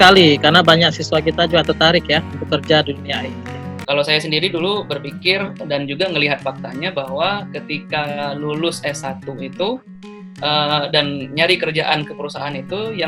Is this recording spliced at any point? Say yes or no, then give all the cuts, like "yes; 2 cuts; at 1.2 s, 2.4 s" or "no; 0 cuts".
yes; 1 cut; at 3.8 s